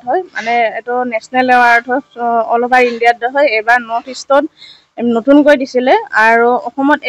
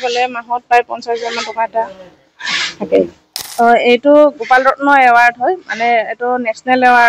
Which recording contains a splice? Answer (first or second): second